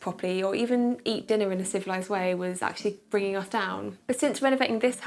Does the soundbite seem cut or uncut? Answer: uncut